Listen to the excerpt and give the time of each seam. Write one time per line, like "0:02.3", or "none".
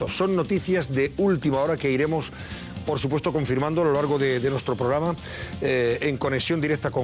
0:03.3